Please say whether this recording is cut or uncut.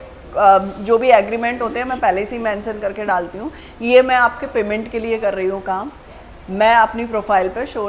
uncut